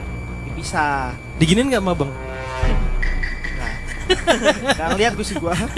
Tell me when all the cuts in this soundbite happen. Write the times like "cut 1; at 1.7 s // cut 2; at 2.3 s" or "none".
none